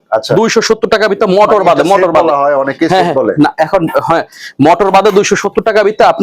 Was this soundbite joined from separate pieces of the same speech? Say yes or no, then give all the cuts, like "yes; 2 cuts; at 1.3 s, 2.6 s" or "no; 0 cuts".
no; 0 cuts